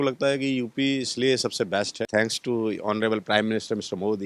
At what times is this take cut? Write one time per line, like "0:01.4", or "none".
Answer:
0:02.1